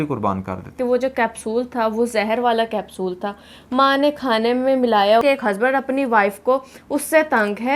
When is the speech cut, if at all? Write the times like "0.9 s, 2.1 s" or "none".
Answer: 0.8 s, 5.2 s